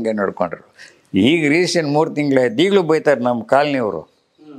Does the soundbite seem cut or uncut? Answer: uncut